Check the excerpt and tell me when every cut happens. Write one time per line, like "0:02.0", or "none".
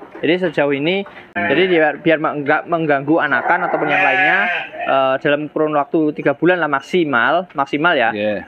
0:01.3